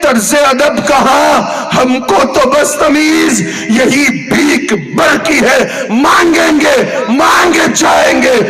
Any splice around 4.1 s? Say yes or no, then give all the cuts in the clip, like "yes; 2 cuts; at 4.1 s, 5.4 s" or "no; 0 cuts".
no; 0 cuts